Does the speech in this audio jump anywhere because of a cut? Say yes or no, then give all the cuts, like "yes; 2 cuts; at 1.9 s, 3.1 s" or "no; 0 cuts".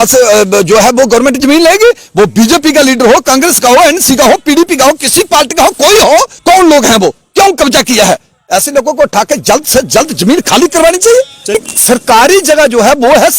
yes; 2 cuts; at 6.3 s, 11.6 s